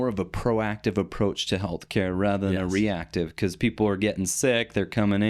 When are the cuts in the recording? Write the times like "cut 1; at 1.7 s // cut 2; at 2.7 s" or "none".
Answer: none